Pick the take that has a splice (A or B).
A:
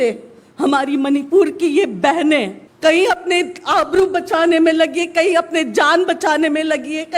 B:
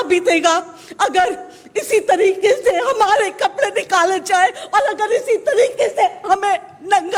A